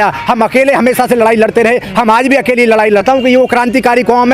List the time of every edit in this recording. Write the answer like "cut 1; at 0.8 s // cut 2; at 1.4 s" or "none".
cut 1; at 3.0 s